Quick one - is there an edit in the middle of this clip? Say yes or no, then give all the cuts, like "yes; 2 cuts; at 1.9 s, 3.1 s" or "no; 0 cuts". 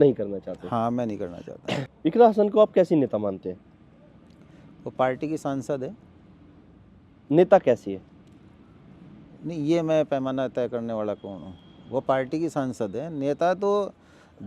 yes; 1 cut; at 1.9 s